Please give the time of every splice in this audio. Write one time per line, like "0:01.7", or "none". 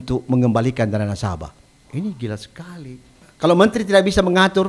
0:03.3

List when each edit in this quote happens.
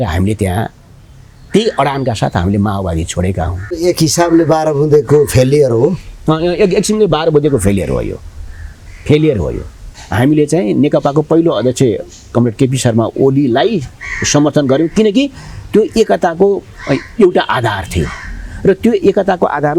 0:03.7
0:09.9

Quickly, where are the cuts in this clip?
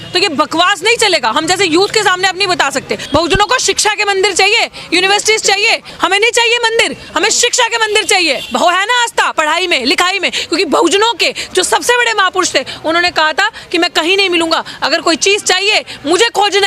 0:03.0
0:05.9
0:08.4

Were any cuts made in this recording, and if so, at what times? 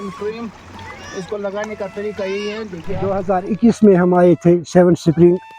0:03.2

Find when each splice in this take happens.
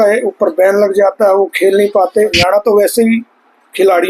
0:02.4

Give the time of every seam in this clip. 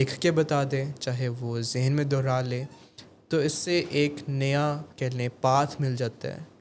0:04.9

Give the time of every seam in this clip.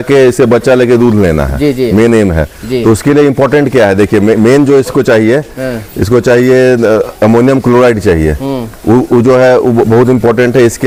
none

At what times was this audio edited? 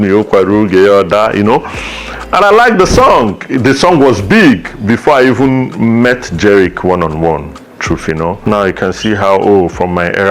0:08.4

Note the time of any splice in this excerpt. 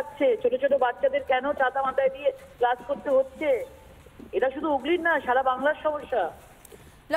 none

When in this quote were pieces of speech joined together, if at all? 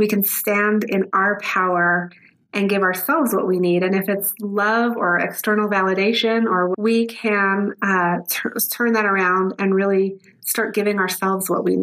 0:06.8

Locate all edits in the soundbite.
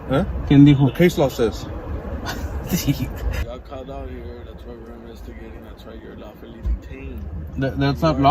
0:03.4

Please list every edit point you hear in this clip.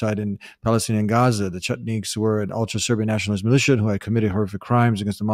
none

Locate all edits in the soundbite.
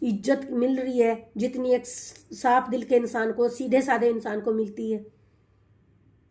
none

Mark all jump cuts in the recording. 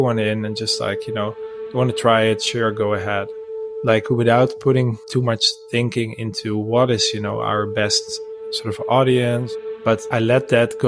0:03.4
0:05.0
0:09.6

